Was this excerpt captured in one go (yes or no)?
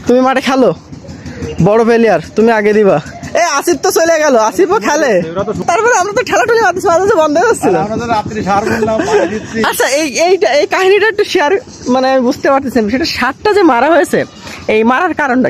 no